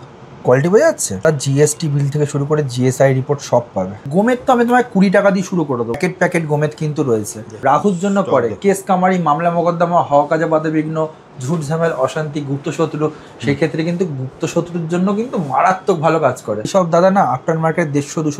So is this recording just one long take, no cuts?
no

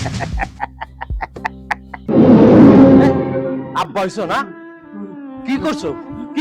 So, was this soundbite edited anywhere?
yes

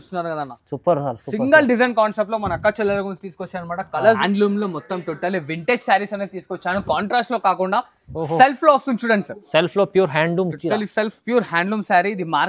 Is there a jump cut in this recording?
yes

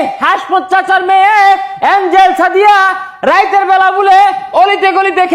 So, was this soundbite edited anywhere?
no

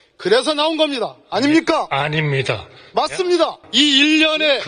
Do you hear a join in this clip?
yes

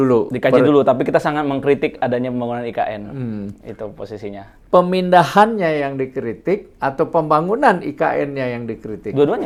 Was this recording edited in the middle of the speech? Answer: no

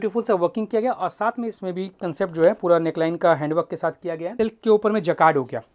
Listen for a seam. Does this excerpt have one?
yes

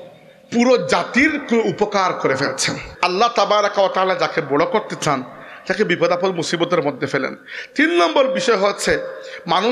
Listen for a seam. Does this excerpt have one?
yes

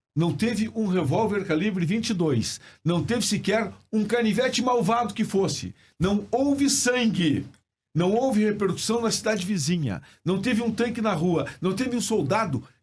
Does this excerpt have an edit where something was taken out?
no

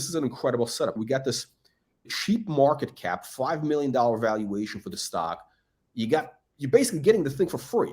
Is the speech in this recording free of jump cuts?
no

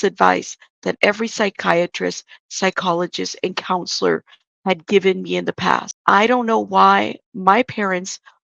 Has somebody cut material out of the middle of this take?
yes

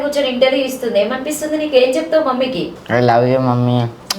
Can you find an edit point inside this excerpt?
yes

